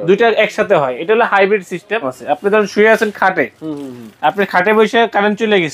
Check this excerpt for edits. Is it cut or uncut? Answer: cut